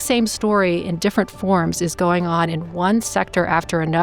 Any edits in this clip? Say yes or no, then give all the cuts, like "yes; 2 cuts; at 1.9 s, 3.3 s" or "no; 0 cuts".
no; 0 cuts